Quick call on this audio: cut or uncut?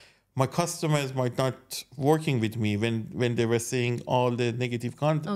uncut